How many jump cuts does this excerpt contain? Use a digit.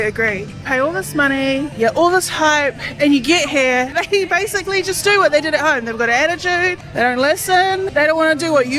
4